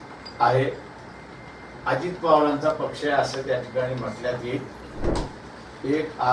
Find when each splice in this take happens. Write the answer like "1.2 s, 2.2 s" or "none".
5.1 s